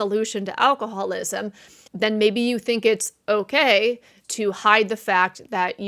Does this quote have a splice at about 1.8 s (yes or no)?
yes